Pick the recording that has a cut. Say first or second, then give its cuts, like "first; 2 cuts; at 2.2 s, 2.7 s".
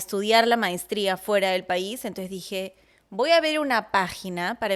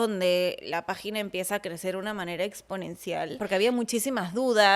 second; 1 cut; at 3.3 s